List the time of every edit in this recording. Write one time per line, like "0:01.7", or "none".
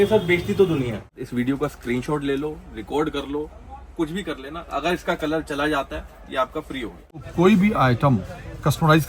0:01.1
0:07.3